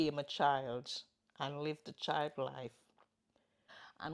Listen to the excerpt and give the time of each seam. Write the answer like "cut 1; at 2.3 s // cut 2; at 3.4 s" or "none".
cut 1; at 3.2 s